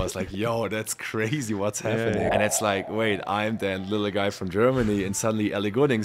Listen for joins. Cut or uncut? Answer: cut